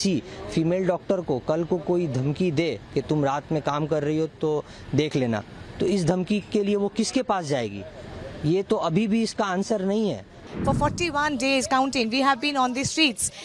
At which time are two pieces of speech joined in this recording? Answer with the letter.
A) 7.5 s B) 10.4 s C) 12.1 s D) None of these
B